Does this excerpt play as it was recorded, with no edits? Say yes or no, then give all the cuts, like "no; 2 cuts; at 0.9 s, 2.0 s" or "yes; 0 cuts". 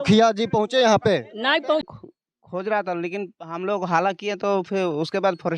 no; 1 cut; at 1.8 s